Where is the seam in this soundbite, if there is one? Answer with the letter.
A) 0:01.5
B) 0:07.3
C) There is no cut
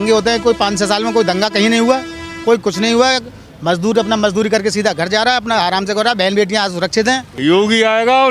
B